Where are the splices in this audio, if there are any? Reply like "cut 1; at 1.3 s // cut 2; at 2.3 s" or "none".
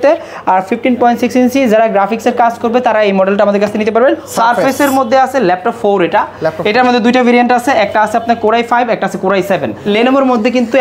cut 1; at 4.3 s // cut 2; at 9.8 s